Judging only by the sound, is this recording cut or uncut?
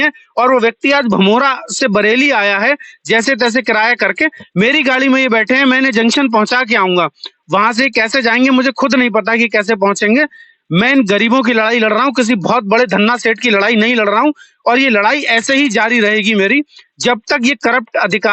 uncut